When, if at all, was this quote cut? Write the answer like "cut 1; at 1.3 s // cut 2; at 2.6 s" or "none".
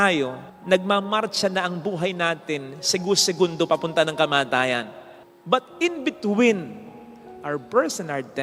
none